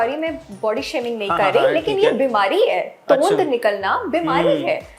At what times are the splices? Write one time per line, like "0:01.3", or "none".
none